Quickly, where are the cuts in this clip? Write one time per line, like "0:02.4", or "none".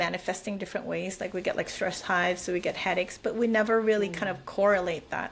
none